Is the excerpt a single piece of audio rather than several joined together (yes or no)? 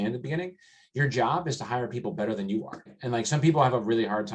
no